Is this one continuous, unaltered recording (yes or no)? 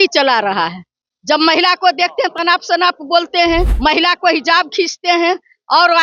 no